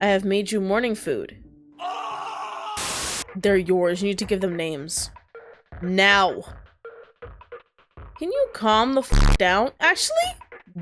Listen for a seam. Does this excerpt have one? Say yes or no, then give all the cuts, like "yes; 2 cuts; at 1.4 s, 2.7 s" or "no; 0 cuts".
yes; 1 cut; at 2.8 s